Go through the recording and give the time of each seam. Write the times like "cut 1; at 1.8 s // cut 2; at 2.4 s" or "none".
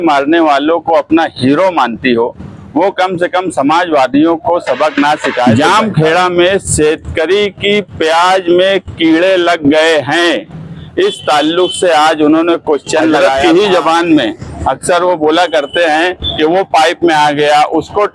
cut 1; at 5.4 s // cut 2; at 13.3 s